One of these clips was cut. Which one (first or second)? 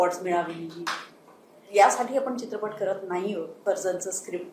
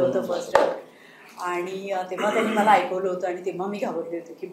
first